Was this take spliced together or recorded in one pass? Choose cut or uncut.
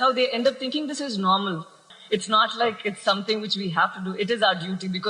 cut